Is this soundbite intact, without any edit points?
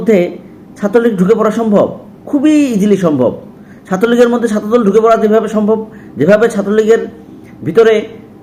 yes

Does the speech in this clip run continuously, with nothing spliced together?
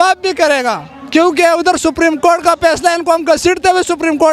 yes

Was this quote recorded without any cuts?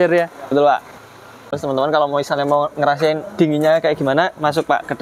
no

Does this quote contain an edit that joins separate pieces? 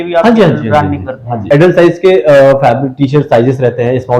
yes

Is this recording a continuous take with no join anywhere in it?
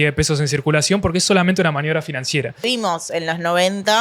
no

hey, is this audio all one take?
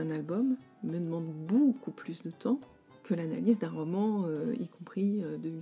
yes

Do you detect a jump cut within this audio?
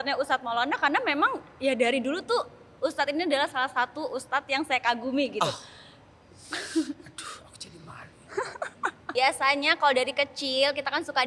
yes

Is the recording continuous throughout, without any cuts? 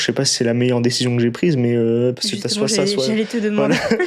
yes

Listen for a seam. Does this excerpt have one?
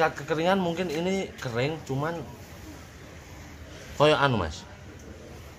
no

